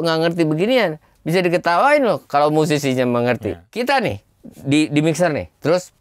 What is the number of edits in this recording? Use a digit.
1